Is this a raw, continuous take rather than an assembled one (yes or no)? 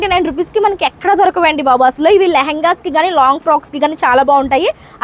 yes